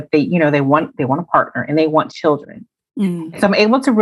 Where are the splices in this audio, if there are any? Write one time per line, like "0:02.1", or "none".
none